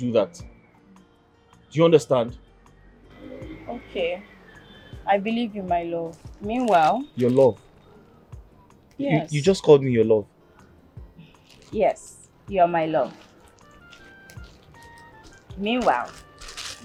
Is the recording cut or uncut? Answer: uncut